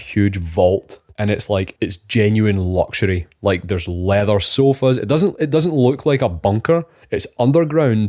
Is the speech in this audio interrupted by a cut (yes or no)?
yes